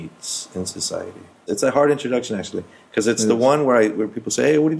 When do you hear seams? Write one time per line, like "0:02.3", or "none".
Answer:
0:01.4